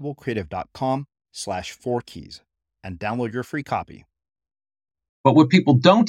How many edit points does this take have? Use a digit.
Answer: 1